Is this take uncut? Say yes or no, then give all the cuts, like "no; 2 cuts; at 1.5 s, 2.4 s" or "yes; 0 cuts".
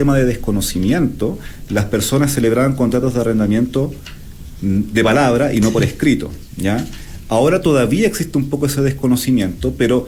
yes; 0 cuts